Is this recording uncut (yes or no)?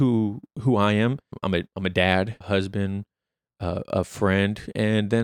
no